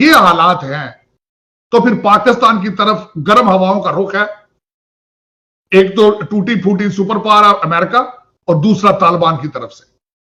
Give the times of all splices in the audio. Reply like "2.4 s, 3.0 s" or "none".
none